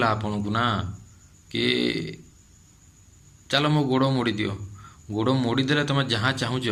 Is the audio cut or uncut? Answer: uncut